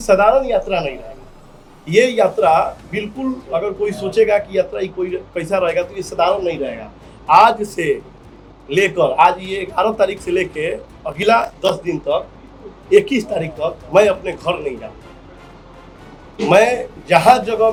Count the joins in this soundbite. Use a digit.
0